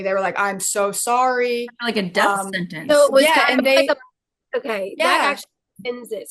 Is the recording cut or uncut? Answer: uncut